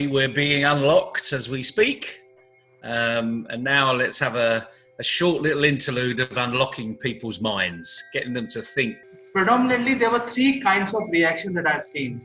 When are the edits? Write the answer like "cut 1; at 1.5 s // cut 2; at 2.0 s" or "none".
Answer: cut 1; at 9.1 s